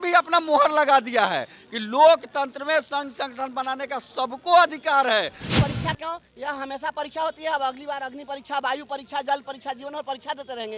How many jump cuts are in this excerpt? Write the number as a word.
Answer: one